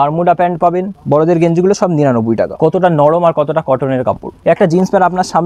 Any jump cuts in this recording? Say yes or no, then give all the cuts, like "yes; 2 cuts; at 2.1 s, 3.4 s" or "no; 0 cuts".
yes; 3 cuts; at 1.0 s, 2.5 s, 4.3 s